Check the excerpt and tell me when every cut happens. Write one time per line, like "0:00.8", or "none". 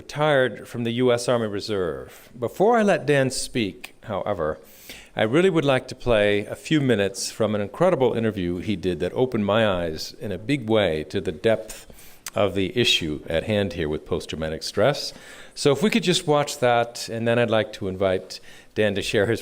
0:07.5

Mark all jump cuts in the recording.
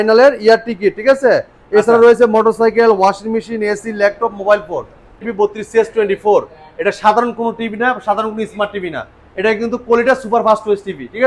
0:05.2

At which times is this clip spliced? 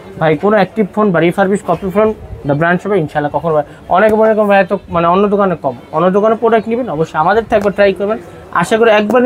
none

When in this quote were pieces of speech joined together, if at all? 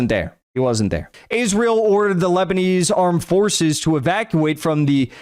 0:01.1

